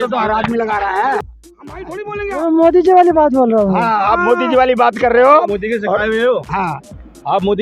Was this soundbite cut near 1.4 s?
yes; 1 cut; at 1.4 s

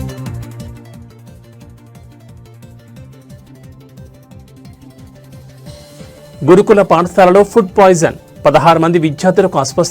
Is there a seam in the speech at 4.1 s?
yes; 1 cut; at 4.1 s

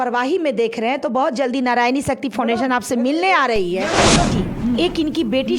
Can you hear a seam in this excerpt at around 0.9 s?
no; 1 cut; at 4.3 s

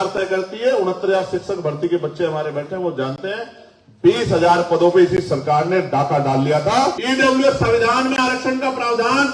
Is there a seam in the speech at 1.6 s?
no; 1 cut; at 7.0 s

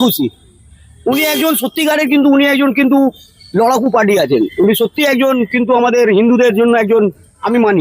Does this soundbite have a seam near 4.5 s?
no; 0 cuts

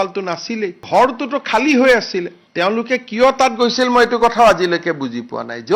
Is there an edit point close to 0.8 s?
yes; 2 cuts; at 0.8 s, 2.4 s

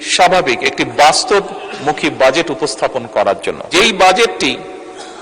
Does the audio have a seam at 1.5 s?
no; 1 cut; at 3.6 s

